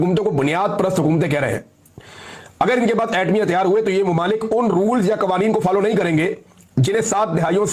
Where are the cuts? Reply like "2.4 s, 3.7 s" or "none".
none